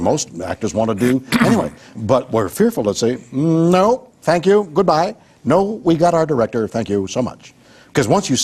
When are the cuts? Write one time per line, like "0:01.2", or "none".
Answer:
0:04.7